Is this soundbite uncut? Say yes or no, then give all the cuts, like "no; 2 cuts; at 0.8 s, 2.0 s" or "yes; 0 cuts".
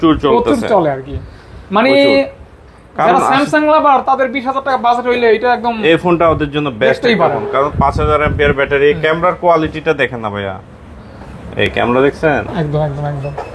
yes; 0 cuts